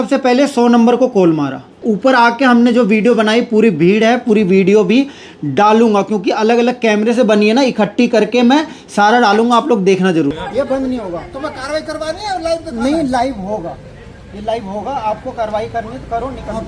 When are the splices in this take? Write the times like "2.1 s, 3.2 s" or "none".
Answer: 1.8 s, 10.3 s

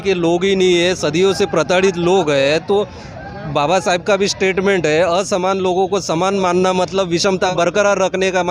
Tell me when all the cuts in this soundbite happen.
7.5 s

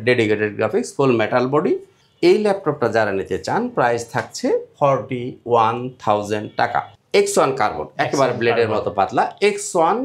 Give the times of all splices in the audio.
6.9 s

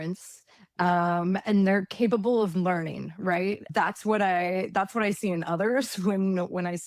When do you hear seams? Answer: 3.6 s

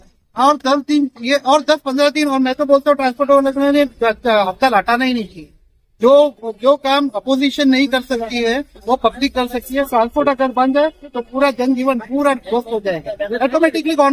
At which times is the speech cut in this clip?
none

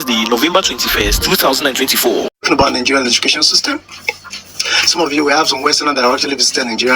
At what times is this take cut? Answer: 2.3 s

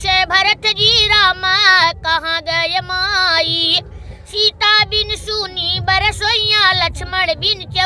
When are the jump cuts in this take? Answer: none

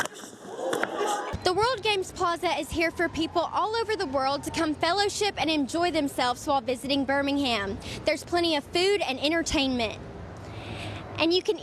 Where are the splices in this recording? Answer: 1.3 s

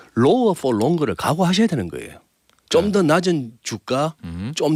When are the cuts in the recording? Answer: none

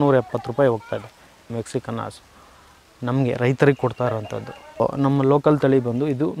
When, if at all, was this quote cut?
1.5 s, 4.8 s

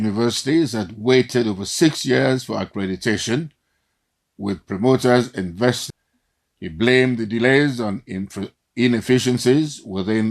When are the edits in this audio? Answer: 5.8 s

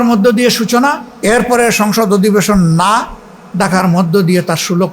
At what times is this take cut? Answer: 1.1 s

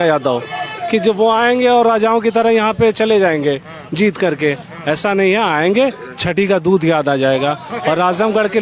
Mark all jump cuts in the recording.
none

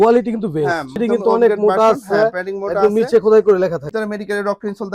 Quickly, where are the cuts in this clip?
1.0 s, 3.9 s

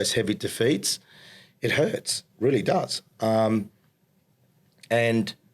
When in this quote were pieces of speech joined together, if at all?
none

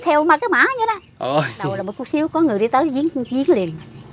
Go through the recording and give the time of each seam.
1.9 s

